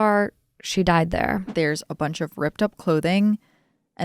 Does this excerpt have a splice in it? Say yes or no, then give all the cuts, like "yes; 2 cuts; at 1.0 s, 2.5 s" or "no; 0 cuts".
yes; 1 cut; at 1.5 s